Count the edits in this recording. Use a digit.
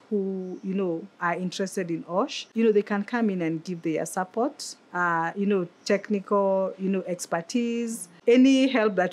2